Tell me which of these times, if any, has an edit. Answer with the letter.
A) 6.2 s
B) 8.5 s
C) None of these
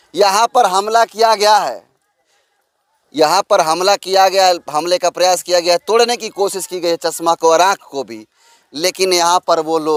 C